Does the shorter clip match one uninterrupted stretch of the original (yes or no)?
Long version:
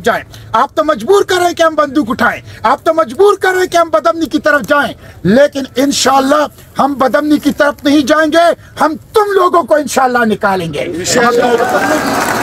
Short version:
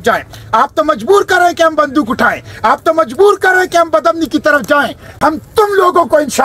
no